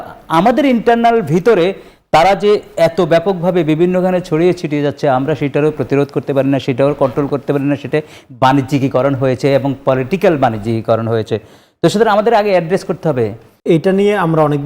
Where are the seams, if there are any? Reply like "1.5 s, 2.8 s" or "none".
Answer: 13.5 s